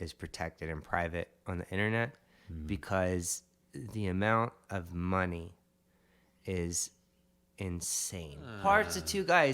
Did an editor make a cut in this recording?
yes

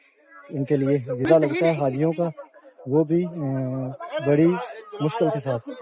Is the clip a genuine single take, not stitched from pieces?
no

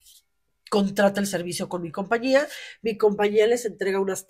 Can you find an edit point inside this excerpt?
no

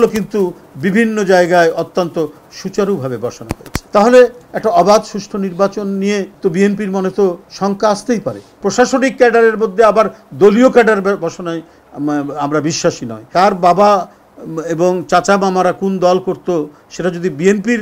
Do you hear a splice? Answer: yes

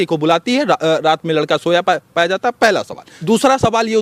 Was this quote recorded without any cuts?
yes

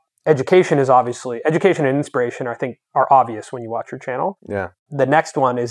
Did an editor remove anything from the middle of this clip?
no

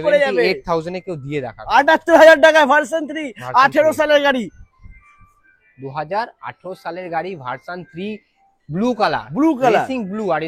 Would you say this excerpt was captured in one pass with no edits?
yes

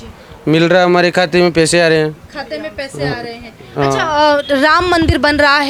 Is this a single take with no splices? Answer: yes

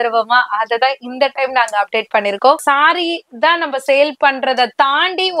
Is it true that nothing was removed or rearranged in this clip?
no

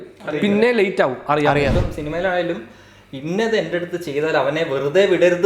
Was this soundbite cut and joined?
yes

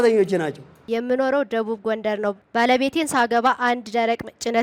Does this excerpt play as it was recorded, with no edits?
no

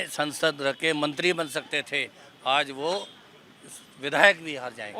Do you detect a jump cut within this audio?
no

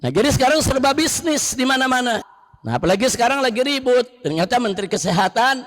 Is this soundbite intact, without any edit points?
no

